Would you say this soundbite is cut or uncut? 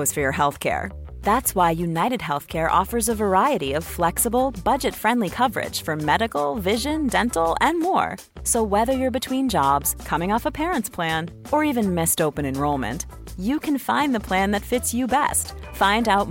uncut